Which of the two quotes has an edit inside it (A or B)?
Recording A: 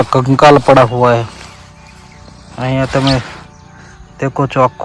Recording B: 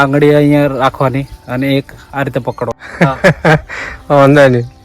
B